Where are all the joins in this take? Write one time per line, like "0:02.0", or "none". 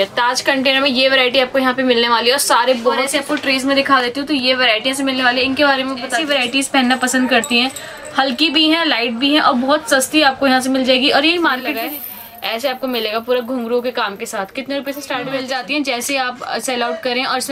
0:03.0
0:06.1
0:11.7
0:15.4